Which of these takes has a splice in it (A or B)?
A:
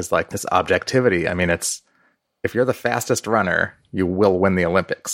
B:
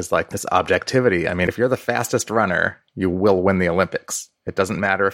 B